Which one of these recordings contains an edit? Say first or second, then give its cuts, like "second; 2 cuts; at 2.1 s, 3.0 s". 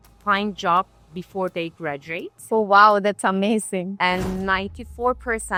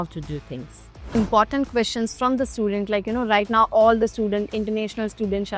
second; 1 cut; at 1.1 s